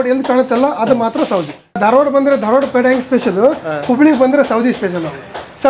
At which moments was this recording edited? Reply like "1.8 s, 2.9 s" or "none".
1.8 s